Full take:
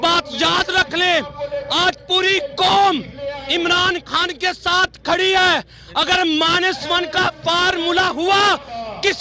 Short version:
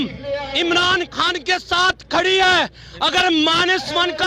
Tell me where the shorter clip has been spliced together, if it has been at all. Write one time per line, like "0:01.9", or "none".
none